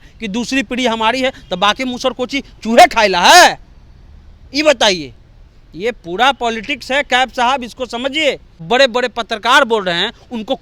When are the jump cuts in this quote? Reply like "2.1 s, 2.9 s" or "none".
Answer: 8.6 s